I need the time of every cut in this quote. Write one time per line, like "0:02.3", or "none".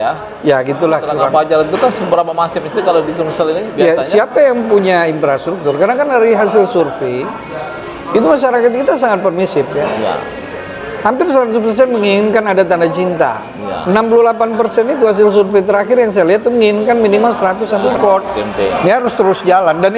0:01.2
0:17.8